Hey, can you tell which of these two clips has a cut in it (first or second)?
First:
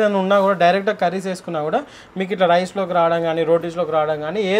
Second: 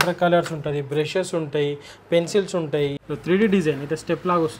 second